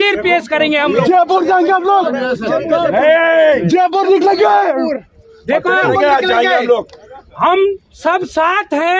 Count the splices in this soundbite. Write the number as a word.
zero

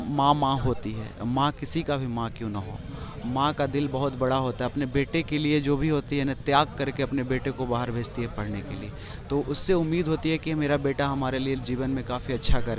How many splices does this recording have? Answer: zero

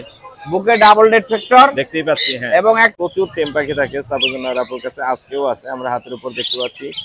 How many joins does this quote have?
one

